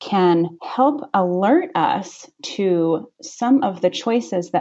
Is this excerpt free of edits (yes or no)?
yes